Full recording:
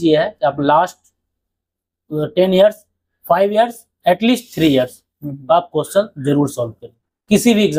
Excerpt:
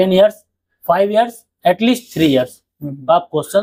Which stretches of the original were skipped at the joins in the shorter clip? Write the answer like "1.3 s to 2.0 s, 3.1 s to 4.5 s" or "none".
none